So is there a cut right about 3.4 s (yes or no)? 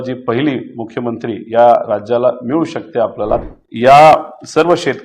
yes